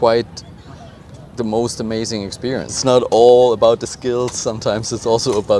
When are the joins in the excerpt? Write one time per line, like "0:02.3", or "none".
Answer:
0:02.7